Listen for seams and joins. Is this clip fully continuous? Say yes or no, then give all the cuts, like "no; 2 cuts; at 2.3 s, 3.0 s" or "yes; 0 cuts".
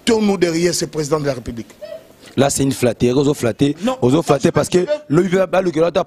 yes; 0 cuts